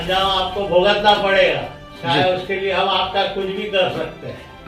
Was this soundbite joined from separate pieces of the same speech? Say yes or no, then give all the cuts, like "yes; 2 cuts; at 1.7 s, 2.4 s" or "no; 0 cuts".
no; 0 cuts